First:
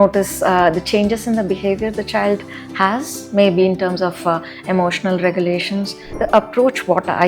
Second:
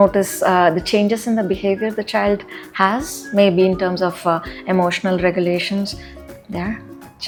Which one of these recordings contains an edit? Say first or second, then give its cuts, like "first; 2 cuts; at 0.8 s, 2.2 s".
first; 1 cut; at 6.1 s